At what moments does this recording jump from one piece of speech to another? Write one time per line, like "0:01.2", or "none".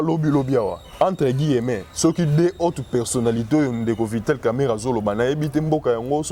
none

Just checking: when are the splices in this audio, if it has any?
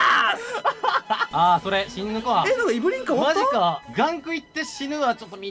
0:01.2
0:03.8

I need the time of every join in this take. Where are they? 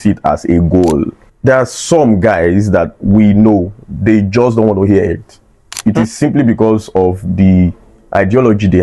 0:01.2
0:05.7

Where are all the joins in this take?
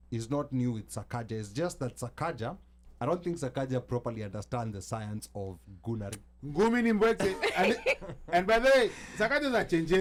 none

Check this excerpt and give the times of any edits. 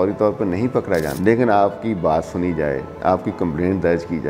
0:01.1

